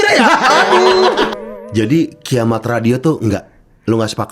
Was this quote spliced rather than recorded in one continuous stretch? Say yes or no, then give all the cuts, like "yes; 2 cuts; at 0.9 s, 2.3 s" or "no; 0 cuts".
yes; 1 cut; at 1.3 s